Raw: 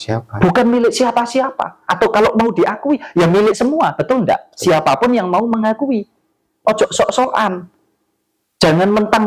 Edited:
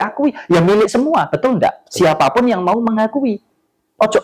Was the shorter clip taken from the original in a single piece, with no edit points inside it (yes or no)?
yes